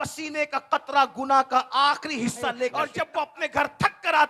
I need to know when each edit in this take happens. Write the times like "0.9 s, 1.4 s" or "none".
3.0 s

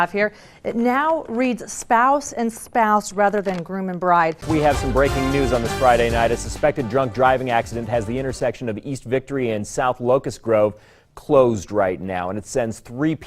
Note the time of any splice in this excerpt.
4.4 s

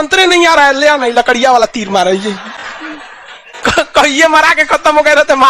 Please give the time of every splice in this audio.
none

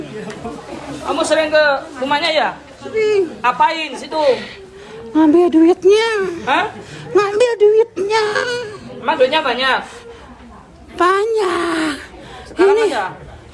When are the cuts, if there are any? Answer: none

